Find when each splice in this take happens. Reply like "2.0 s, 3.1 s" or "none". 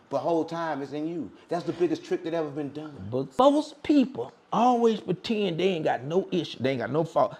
3.4 s

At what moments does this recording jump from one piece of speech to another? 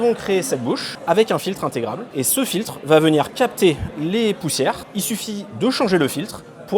0.9 s, 2.0 s, 4.9 s

